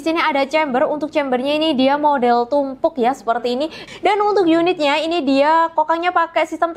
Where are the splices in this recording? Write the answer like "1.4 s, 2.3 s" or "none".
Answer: 3.8 s